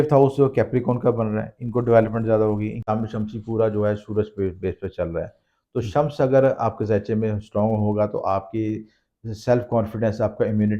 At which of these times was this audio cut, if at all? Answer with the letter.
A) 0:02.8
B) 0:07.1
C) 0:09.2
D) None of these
A